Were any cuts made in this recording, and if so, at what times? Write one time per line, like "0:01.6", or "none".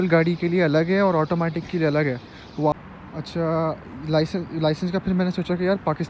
0:02.7